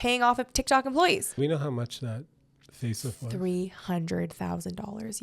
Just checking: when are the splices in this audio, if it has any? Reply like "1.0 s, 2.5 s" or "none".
1.3 s